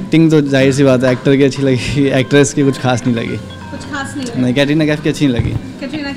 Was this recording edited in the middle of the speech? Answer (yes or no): no